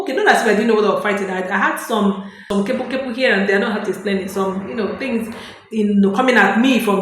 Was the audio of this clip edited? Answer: yes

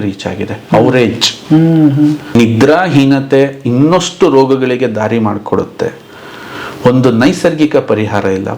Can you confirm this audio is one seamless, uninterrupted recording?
no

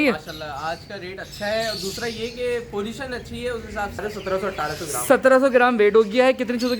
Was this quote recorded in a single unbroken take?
no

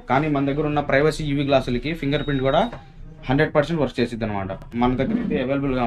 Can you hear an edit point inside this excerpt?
yes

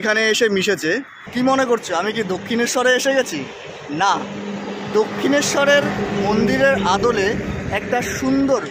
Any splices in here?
yes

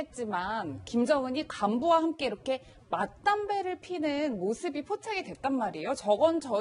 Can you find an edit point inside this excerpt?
yes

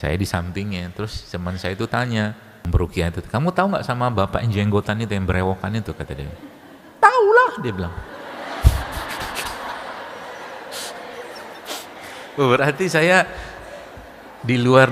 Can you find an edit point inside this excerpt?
yes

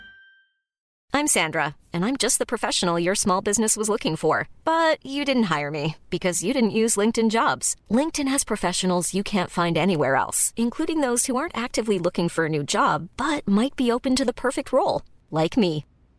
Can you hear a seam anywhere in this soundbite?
yes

